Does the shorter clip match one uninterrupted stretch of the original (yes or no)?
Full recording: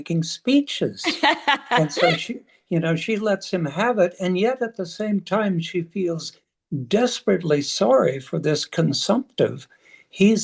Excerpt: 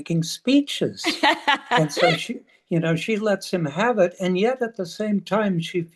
yes